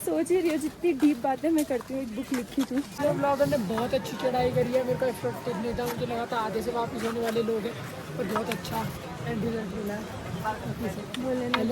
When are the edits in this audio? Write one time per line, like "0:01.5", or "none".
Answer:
0:03.0